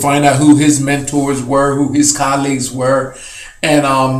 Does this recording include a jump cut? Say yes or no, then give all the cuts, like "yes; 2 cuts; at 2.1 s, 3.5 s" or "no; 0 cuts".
no; 0 cuts